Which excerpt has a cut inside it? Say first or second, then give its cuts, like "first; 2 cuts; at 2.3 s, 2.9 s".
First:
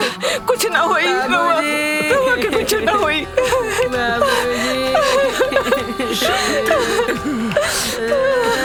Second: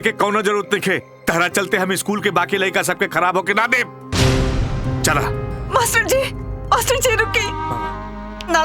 second; 1 cut; at 7.5 s